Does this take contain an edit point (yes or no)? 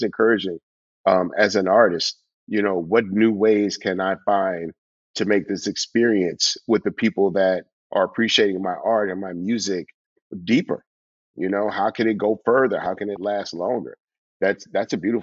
no